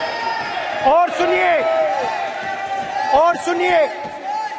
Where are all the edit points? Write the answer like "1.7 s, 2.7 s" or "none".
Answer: none